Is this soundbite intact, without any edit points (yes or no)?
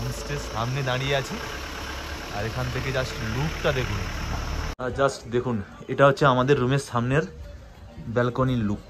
no